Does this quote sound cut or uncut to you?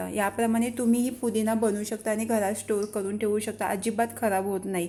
uncut